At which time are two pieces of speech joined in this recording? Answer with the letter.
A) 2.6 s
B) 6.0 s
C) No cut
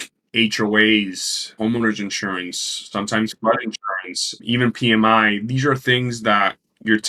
C